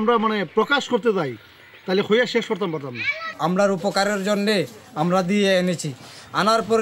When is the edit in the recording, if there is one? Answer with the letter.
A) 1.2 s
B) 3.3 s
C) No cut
B